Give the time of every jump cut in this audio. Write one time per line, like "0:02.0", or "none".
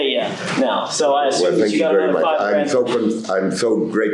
none